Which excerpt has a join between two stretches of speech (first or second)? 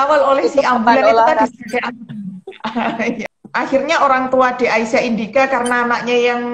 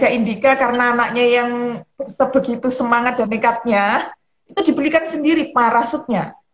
first